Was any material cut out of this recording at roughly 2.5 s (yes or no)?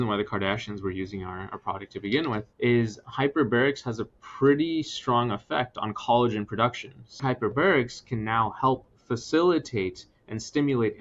yes